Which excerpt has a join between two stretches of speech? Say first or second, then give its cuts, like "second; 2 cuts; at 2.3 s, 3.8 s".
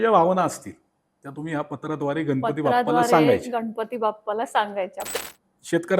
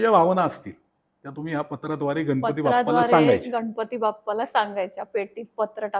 first; 1 cut; at 5.1 s